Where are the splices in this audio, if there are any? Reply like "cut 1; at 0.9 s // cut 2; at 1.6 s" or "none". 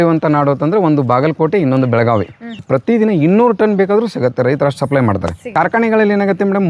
cut 1; at 2.6 s // cut 2; at 5.5 s